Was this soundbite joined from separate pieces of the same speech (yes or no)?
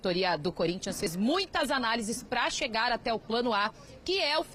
no